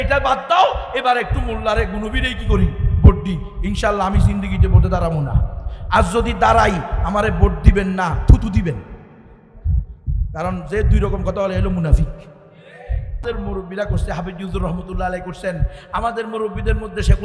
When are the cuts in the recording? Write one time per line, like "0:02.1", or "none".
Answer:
0:13.2